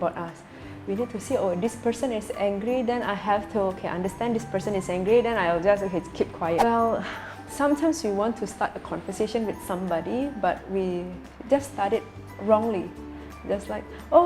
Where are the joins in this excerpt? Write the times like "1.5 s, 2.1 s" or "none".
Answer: 6.6 s